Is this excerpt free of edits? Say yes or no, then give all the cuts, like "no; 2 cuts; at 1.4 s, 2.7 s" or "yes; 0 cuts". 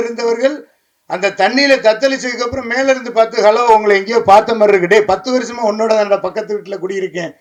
yes; 0 cuts